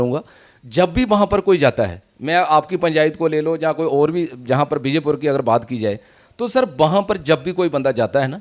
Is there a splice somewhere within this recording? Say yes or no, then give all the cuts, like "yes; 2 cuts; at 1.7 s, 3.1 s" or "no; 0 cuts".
no; 0 cuts